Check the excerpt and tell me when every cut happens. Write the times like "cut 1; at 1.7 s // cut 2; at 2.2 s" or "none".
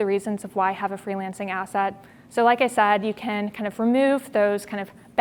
none